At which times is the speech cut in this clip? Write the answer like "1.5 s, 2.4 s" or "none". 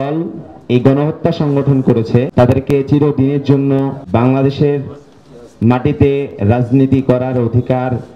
2.3 s, 4.0 s